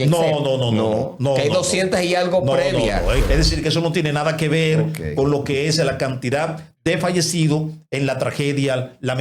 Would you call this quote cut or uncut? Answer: cut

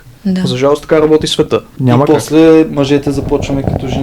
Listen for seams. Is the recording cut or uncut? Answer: cut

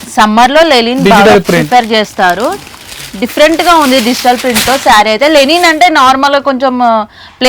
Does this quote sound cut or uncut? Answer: uncut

